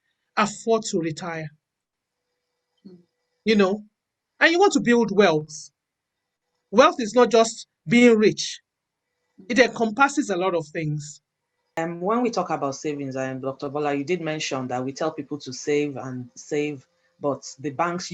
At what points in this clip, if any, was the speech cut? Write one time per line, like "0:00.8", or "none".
0:11.8